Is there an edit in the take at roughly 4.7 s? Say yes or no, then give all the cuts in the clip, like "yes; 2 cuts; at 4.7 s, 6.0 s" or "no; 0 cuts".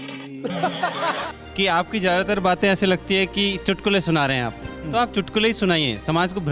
no; 1 cut; at 1.3 s